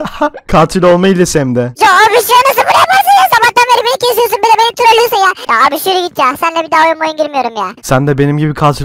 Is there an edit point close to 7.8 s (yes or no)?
yes